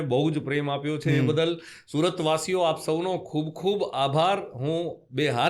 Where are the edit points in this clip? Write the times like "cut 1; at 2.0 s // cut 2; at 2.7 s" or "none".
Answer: none